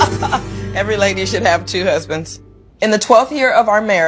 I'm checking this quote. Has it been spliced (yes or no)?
yes